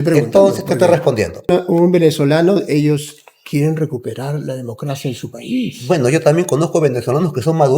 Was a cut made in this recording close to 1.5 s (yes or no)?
yes